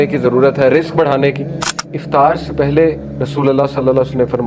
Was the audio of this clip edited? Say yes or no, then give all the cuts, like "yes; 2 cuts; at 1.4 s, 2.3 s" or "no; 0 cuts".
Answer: yes; 1 cut; at 1.9 s